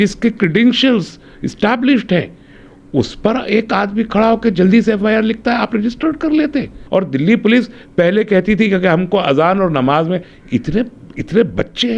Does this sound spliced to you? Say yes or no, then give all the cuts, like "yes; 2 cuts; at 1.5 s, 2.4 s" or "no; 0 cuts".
yes; 1 cut; at 6.8 s